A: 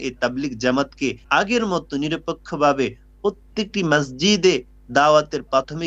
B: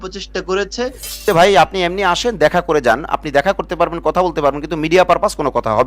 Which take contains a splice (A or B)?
B